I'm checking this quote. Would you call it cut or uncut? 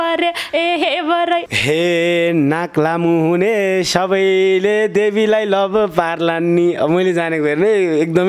cut